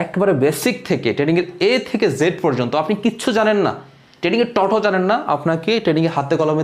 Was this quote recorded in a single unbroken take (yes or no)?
yes